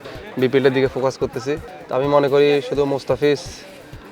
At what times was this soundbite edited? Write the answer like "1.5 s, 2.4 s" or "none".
1.6 s

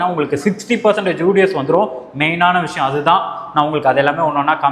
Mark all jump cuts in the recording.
none

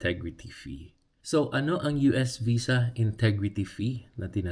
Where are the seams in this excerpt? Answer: none

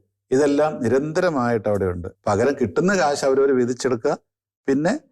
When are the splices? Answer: 2.1 s

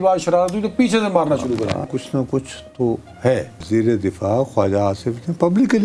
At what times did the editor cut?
1.9 s, 3.5 s

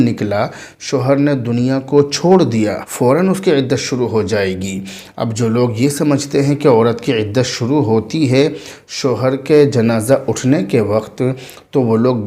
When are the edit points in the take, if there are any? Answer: 2.8 s

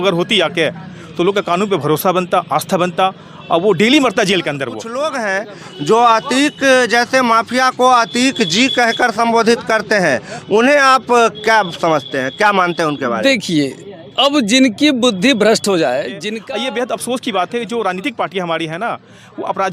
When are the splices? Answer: 4.8 s, 16.2 s

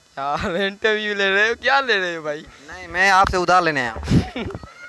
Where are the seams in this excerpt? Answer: none

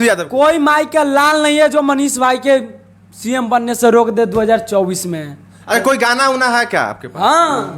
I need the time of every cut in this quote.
none

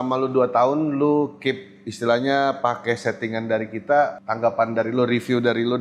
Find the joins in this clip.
4.2 s

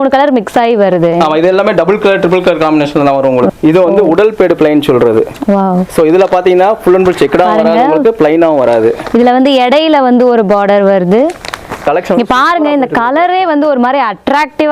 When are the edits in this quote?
3.5 s, 11.8 s

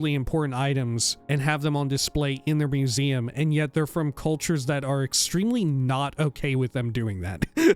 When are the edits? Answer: 1.1 s

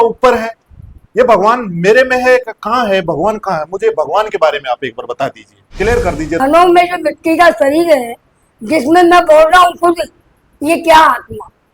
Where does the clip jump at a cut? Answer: 6.4 s

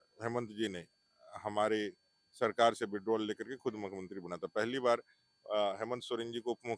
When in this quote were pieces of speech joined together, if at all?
none

